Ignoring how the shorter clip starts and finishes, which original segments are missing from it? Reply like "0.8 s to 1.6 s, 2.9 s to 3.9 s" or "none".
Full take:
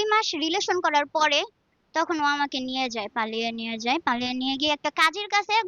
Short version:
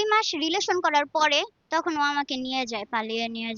1.6 s to 1.8 s